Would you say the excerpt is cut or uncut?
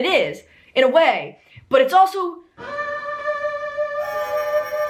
uncut